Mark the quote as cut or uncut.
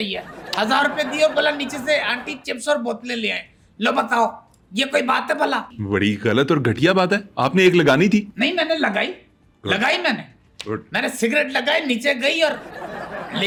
uncut